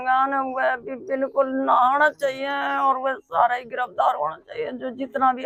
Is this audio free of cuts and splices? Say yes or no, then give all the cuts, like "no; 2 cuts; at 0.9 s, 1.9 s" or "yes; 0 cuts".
yes; 0 cuts